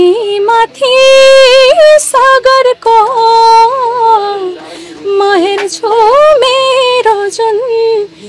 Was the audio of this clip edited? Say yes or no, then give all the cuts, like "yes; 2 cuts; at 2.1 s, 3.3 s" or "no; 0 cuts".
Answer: no; 0 cuts